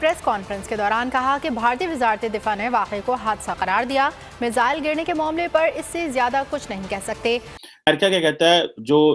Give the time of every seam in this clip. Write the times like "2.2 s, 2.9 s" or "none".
7.6 s